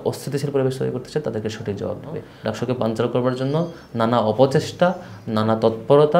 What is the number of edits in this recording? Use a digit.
1